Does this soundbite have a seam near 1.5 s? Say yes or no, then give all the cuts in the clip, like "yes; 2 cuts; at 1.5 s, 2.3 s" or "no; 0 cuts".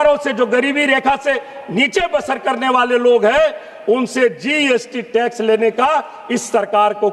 no; 0 cuts